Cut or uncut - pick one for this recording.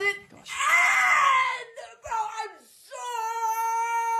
uncut